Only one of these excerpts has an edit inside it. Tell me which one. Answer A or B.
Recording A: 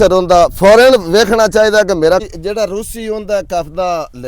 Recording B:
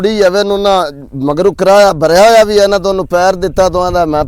A